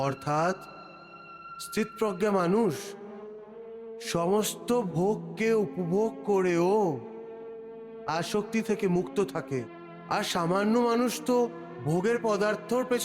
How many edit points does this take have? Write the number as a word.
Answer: one